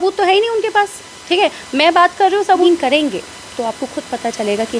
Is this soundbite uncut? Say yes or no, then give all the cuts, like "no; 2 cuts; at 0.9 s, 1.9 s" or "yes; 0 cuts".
no; 1 cut; at 2.6 s